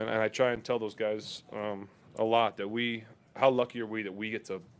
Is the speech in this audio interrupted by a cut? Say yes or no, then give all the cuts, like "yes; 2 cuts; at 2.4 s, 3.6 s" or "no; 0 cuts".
no; 0 cuts